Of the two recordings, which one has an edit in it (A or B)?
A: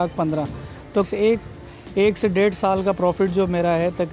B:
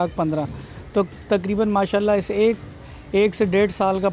A